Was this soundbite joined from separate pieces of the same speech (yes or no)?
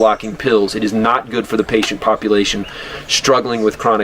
no